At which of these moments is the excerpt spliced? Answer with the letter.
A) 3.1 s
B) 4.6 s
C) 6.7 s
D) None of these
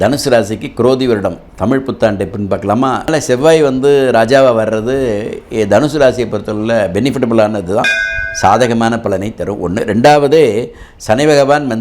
A